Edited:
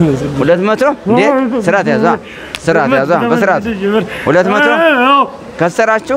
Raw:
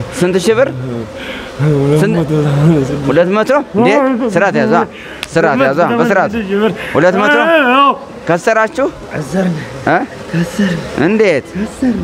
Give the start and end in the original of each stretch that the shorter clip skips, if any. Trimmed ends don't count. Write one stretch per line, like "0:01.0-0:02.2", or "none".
none